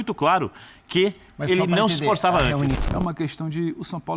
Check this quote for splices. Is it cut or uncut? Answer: cut